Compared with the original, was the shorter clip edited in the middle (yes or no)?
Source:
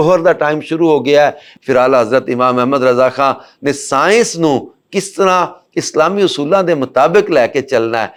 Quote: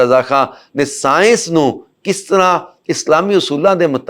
no